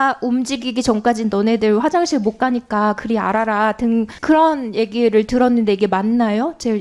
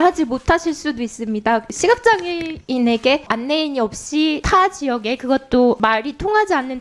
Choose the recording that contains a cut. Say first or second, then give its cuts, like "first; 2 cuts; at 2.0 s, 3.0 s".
second; 4 cuts; at 1.7 s, 3.3 s, 4.4 s, 5.8 s